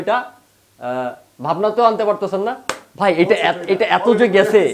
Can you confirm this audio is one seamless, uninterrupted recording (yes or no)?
no